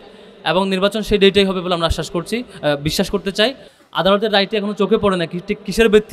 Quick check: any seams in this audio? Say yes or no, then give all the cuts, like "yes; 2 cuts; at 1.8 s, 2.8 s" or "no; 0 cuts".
no; 0 cuts